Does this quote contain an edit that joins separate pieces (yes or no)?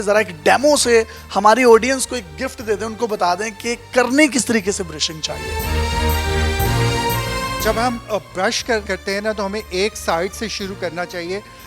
no